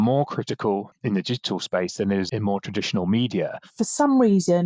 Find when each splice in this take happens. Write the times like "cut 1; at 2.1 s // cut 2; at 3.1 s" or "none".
cut 1; at 0.9 s // cut 2; at 2.3 s // cut 3; at 3.6 s